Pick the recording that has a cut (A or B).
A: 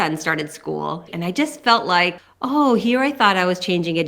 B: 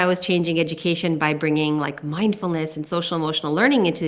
A